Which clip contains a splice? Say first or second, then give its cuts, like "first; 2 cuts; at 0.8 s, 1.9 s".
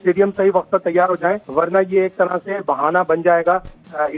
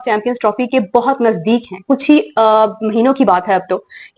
first; 1 cut; at 1.4 s